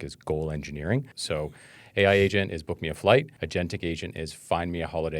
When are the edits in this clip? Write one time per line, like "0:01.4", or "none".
0:01.1
0:03.4